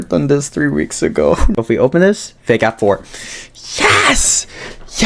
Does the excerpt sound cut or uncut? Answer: cut